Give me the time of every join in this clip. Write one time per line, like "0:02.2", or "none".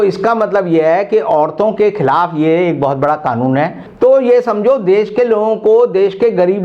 0:03.8